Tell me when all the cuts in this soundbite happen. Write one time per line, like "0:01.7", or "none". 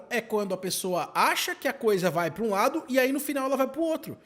none